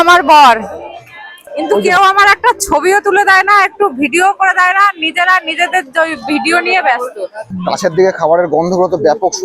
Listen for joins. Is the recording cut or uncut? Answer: cut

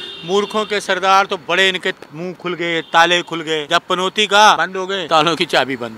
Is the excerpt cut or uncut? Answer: cut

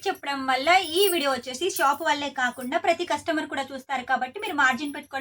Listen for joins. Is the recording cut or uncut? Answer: uncut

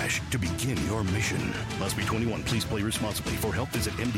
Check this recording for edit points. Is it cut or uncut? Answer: uncut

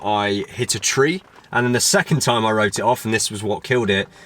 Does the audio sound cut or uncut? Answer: cut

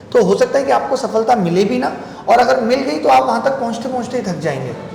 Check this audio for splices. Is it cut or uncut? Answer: uncut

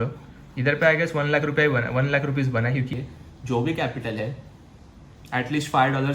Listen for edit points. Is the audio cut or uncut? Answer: cut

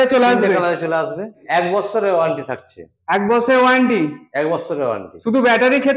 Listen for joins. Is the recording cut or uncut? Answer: cut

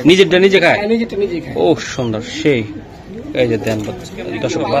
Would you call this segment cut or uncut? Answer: uncut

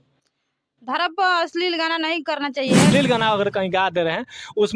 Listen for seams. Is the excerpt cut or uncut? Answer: cut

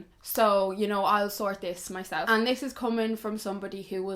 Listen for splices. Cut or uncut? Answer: cut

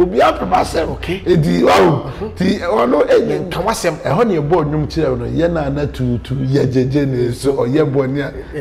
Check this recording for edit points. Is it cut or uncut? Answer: uncut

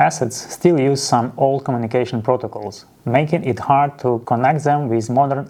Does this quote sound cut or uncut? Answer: uncut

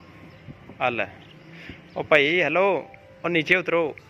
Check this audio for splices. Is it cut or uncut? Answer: uncut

